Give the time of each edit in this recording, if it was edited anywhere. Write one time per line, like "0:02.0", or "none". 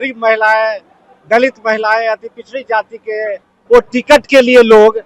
0:03.5